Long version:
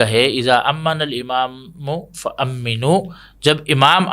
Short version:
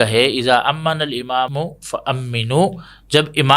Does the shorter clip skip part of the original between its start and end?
yes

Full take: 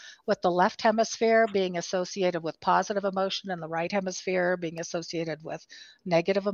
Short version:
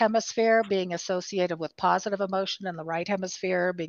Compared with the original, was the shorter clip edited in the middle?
no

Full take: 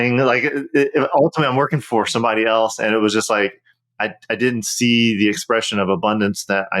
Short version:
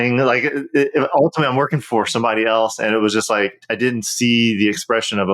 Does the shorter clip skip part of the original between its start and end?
yes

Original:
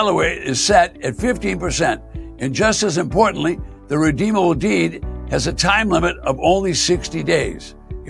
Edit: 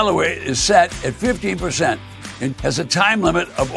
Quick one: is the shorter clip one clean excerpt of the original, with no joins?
no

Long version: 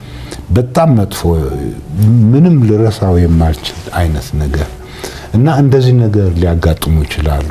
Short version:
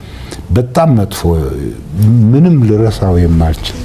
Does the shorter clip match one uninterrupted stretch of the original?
yes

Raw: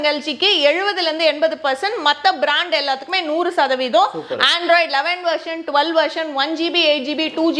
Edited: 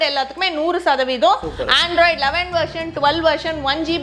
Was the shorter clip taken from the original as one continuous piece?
yes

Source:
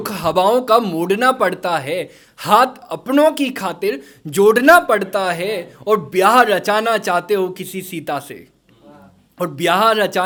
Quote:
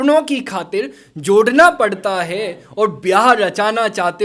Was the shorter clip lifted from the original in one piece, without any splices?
yes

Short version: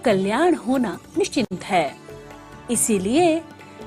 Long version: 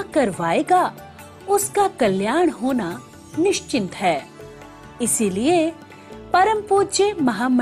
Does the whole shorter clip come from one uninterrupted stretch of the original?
no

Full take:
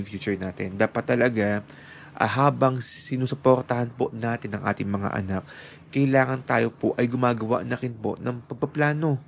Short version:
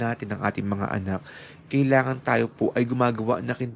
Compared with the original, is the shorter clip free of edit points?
yes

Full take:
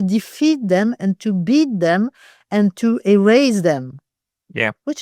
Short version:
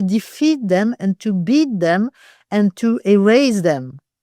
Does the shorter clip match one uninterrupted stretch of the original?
yes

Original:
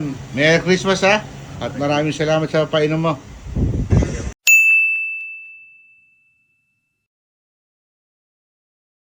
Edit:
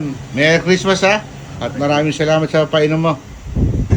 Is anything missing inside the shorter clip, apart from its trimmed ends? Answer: no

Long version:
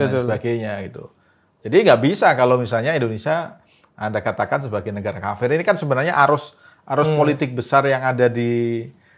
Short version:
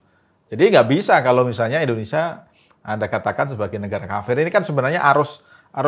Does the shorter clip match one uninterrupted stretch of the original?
yes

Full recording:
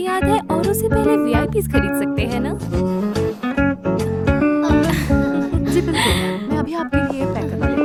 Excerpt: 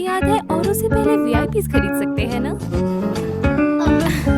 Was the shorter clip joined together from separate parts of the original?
yes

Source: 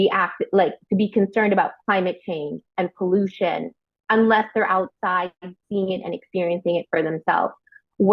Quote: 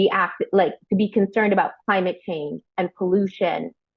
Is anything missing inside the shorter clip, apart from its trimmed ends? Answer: no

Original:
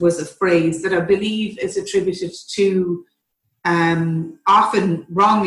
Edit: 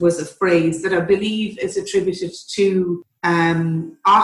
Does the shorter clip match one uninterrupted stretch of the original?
no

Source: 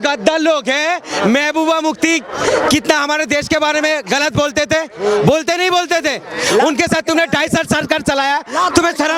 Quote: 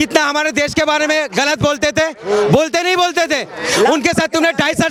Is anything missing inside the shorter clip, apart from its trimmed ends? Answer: no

